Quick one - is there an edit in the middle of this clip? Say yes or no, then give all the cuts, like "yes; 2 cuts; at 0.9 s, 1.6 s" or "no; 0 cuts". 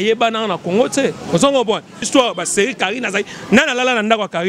yes; 1 cut; at 2.0 s